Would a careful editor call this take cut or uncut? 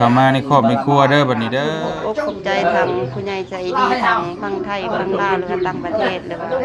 cut